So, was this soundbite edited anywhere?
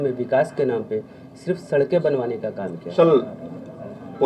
yes; 1 cut; at 2.9 s

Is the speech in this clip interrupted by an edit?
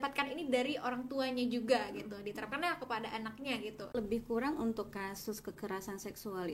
yes; 1 cut; at 3.9 s

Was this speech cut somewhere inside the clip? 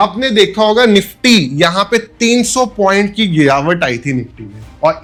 no; 0 cuts

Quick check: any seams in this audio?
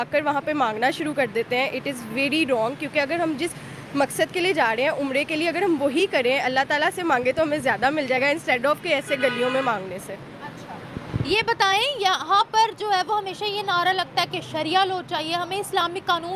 no; 0 cuts

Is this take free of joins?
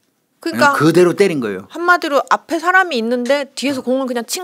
yes; 0 cuts

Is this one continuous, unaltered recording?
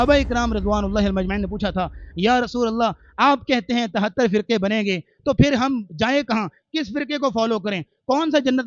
yes; 0 cuts

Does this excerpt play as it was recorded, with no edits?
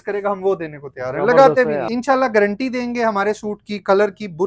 no; 1 cut; at 1.9 s

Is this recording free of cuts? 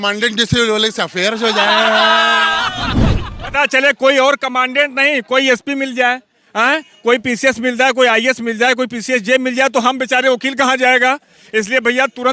yes; 0 cuts

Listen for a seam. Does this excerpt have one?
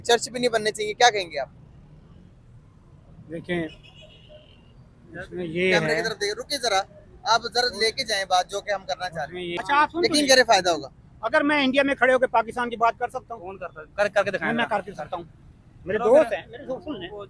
yes; 1 cut; at 9.6 s

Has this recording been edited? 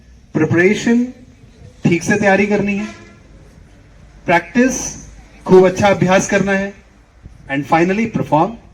no; 0 cuts

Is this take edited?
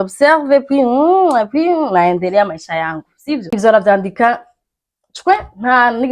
yes; 1 cut; at 3.5 s

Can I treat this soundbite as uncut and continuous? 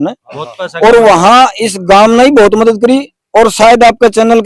yes; 0 cuts

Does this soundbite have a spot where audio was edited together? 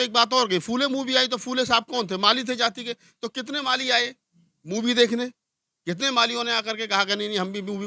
no; 0 cuts

